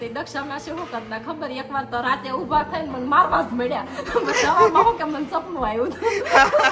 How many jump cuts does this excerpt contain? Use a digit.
0